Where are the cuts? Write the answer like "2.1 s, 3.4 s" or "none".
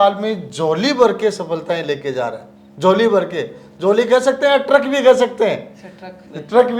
none